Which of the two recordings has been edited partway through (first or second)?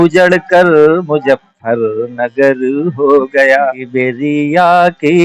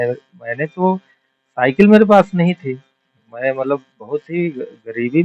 first